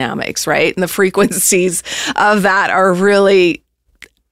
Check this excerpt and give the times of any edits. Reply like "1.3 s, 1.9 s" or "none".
none